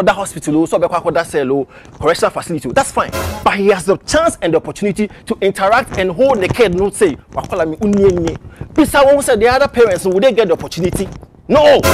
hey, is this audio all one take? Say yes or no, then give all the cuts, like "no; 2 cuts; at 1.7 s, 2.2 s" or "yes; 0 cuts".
yes; 0 cuts